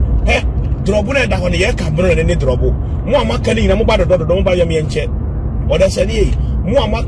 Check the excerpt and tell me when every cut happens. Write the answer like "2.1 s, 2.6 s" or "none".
none